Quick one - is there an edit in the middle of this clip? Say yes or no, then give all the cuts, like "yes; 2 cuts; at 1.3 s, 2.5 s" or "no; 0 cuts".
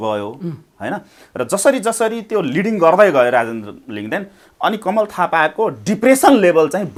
no; 0 cuts